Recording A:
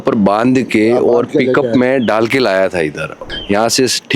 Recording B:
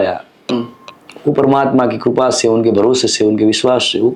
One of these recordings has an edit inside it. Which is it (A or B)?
A